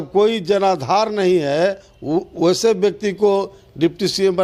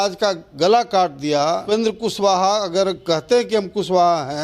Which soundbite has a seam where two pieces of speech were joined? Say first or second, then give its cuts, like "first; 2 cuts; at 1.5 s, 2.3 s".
second; 1 cut; at 1.7 s